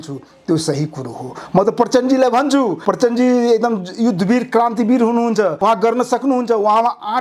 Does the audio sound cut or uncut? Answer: cut